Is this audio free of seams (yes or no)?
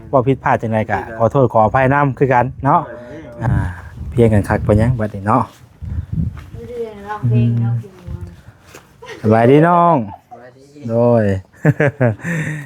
no